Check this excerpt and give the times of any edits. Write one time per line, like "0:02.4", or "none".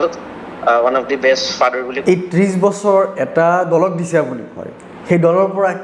0:02.0